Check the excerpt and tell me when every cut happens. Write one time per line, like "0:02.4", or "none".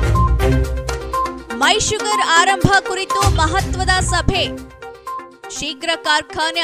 0:01.3

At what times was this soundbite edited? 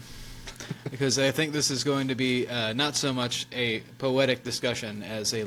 none

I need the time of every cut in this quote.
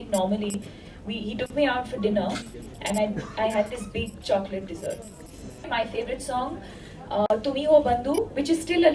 0:05.7

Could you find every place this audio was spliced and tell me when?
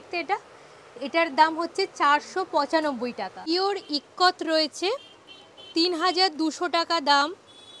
0:03.5

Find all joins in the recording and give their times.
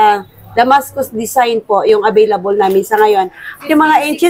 none

